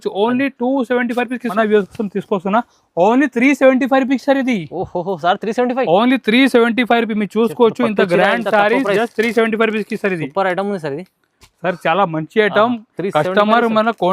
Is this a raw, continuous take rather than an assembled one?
no; 1 cut; at 1.5 s

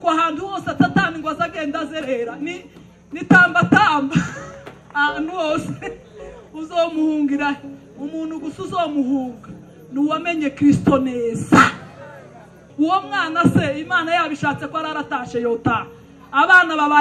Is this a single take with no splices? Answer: no; 1 cut; at 12.7 s

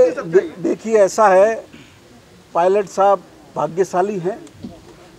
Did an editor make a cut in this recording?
no; 0 cuts

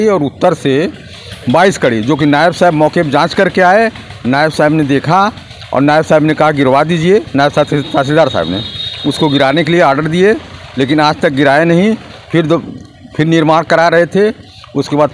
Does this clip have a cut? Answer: no; 0 cuts

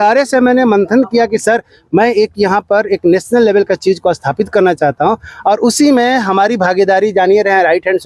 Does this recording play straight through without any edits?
yes; 0 cuts

